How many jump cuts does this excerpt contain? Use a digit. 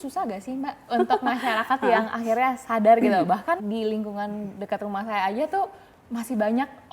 1